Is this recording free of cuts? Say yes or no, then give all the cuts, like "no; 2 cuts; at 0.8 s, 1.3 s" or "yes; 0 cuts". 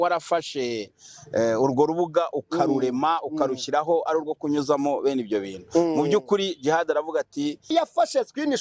no; 1 cut; at 7.7 s